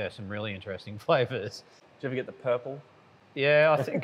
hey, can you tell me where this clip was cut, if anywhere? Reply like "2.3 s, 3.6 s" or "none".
1.8 s